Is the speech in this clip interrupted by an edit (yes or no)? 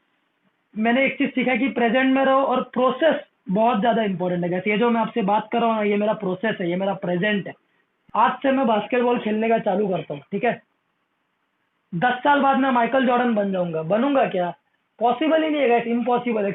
yes